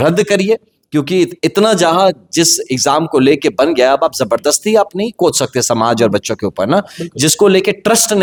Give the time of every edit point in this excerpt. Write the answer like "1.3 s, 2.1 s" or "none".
none

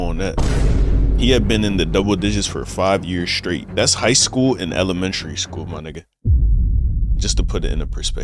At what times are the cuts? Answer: 3.7 s

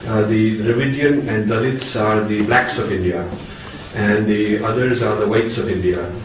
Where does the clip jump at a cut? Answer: none

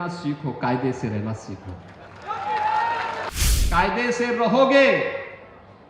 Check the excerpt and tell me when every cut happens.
3.4 s

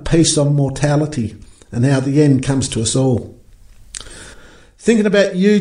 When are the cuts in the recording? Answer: 4.4 s

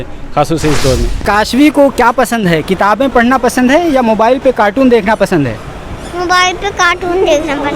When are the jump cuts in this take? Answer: 1.2 s

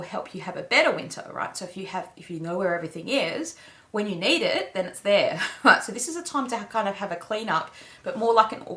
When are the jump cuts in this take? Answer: none

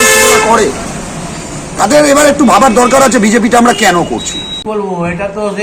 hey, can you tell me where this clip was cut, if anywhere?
4.6 s

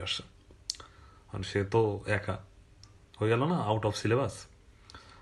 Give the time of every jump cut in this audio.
none

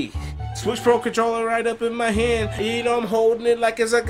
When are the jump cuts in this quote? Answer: 2.5 s

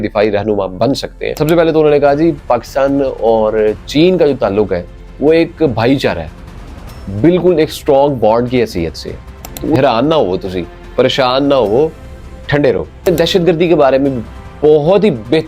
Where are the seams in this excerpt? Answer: 1.4 s, 9.8 s, 13.1 s

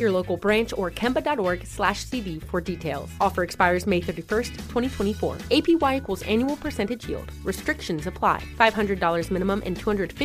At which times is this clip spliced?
none

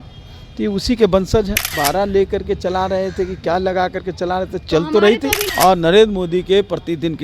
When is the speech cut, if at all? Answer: 1.7 s, 5.4 s

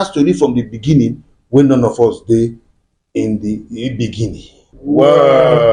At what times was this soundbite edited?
4.7 s

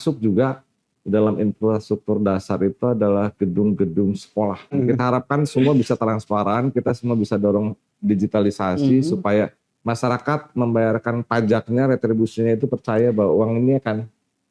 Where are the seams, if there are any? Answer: 4.7 s

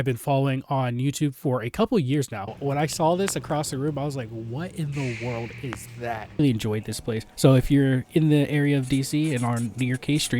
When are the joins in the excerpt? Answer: 2.4 s, 6.4 s

